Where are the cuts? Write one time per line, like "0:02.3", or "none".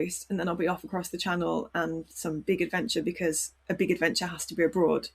0:03.5